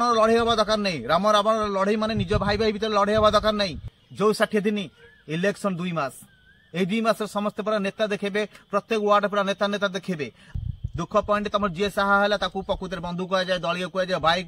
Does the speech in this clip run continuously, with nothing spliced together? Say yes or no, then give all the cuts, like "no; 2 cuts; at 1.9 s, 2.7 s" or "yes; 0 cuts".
no; 2 cuts; at 4.0 s, 10.5 s